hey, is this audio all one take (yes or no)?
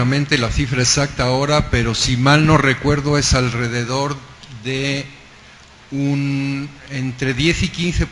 no